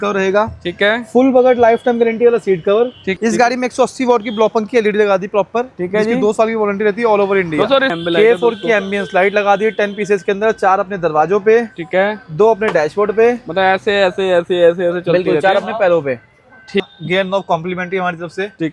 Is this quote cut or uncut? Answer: cut